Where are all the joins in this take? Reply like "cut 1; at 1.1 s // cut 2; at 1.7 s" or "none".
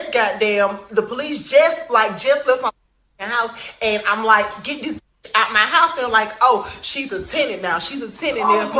cut 1; at 2.2 s // cut 2; at 6.5 s